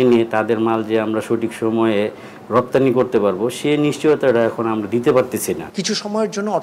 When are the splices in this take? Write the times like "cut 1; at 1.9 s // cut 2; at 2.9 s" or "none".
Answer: cut 1; at 5.7 s